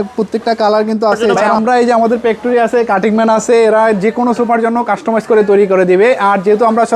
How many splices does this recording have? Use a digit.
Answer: 1